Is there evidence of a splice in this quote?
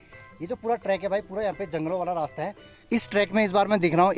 yes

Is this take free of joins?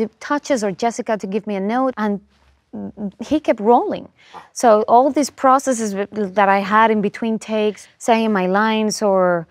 no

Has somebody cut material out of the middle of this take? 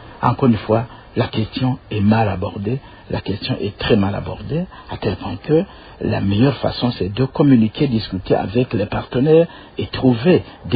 no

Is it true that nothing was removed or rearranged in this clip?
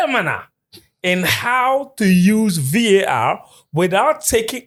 yes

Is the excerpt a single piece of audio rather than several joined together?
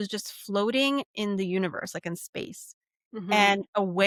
yes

